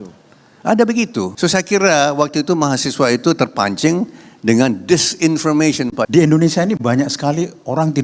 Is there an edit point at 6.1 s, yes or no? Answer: yes